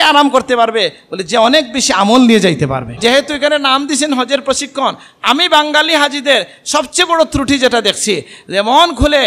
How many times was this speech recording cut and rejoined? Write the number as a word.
one